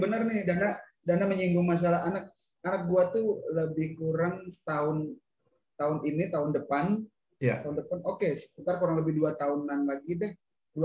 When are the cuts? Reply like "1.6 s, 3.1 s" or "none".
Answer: none